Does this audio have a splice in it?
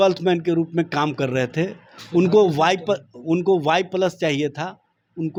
no; 0 cuts

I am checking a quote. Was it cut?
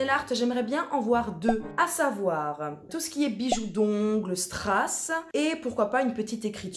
yes; 2 cuts; at 1.7 s, 5.1 s

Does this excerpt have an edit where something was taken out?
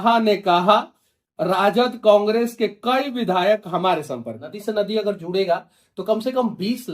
yes; 1 cut; at 4.5 s

